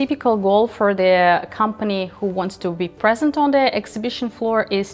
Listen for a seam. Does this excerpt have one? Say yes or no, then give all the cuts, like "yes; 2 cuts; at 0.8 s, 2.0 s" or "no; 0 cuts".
no; 0 cuts